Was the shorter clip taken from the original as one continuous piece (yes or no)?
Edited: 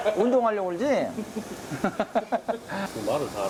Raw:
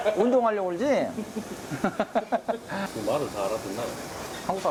yes